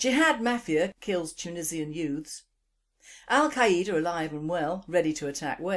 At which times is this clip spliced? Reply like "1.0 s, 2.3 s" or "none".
4.4 s